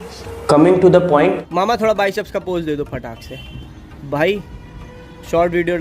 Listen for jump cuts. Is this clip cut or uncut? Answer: cut